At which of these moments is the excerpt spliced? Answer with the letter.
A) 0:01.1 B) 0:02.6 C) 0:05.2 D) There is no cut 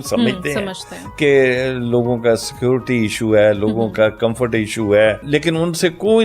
C